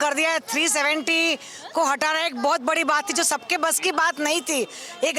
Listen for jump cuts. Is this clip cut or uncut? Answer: uncut